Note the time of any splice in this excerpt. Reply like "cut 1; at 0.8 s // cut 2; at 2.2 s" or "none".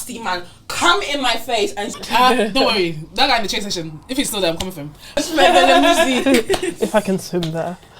cut 1; at 2.0 s // cut 2; at 5.2 s